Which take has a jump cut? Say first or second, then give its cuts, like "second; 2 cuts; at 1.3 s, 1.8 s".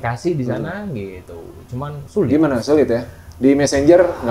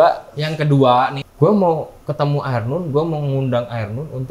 second; 1 cut; at 1.2 s